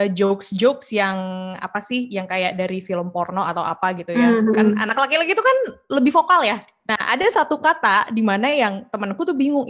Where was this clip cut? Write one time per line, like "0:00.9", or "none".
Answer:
0:06.6